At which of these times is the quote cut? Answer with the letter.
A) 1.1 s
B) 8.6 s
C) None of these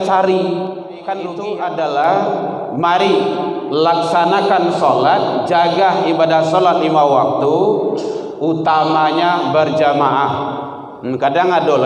A